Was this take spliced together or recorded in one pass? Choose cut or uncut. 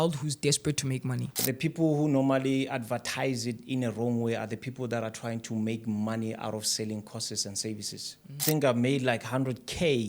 cut